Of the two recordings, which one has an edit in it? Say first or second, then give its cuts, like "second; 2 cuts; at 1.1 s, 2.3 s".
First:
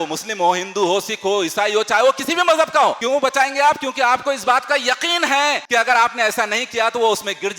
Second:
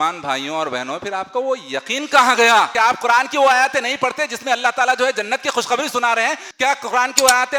first; 2 cuts; at 3.0 s, 5.6 s